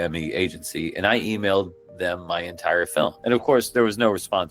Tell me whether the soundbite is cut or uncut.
cut